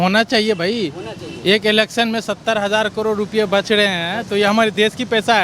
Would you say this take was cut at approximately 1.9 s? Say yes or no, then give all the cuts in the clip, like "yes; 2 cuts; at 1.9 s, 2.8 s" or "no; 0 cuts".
no; 0 cuts